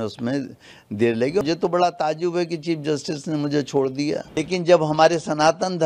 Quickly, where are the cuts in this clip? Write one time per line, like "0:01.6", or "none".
0:01.4
0:04.4